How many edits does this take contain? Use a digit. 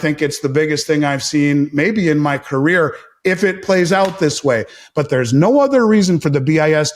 0